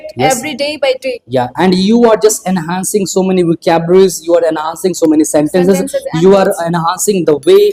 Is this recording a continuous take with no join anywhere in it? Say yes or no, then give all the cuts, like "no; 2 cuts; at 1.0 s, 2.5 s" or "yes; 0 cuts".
yes; 0 cuts